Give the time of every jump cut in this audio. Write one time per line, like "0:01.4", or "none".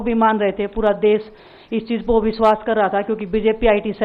none